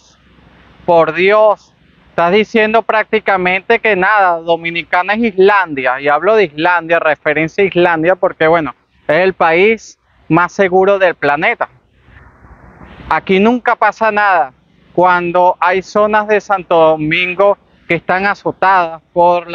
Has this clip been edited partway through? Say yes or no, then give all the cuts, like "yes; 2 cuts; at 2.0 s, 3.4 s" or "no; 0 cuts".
no; 0 cuts